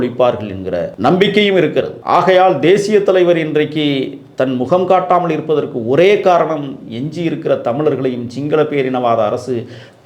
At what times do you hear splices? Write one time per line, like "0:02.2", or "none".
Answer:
0:00.9
0:02.0